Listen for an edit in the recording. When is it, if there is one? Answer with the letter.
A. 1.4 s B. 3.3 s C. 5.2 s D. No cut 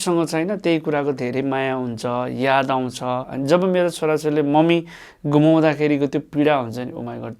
B